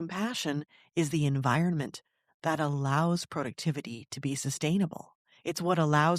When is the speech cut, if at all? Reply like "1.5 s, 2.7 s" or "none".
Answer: none